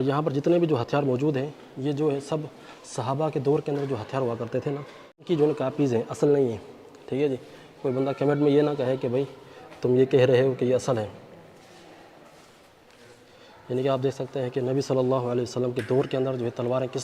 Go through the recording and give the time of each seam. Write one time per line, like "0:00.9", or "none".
none